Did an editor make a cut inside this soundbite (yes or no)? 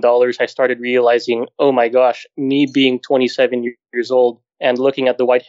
no